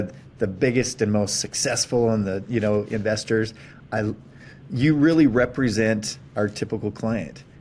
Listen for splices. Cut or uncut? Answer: uncut